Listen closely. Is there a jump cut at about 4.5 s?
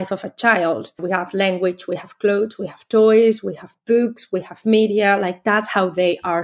no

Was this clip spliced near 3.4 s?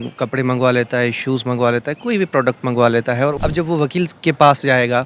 yes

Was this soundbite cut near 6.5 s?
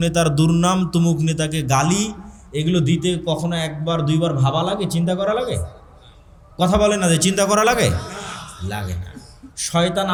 no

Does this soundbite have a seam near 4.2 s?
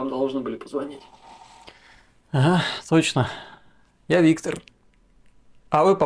yes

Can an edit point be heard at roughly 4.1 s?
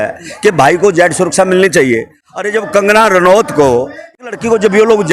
yes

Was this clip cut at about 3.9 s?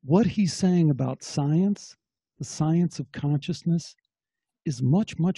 no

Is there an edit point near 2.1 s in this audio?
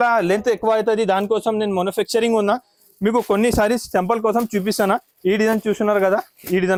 no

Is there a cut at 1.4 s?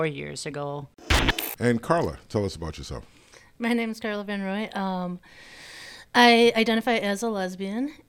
yes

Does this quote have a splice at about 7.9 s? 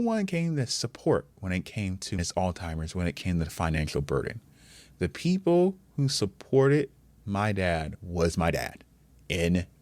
yes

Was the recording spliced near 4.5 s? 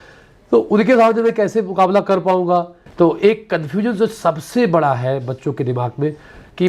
no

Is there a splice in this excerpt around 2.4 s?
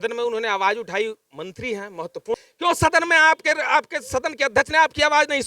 yes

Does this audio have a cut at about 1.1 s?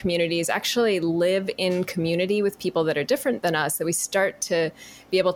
yes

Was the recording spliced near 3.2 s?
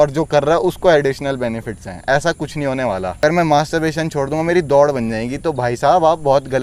yes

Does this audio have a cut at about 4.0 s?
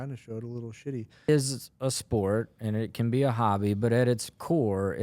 no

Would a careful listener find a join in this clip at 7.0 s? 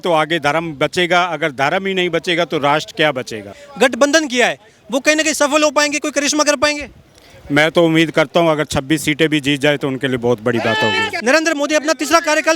no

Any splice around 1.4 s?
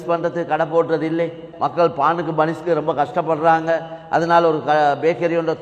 yes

